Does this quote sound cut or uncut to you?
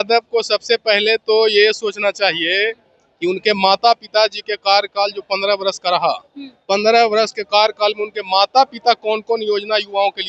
uncut